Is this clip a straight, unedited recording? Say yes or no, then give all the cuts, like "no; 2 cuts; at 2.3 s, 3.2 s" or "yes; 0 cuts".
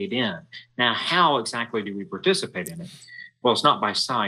yes; 0 cuts